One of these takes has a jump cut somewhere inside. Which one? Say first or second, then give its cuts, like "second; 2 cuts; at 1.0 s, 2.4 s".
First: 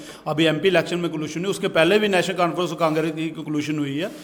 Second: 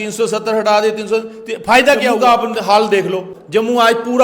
second; 2 cuts; at 2.2 s, 3.3 s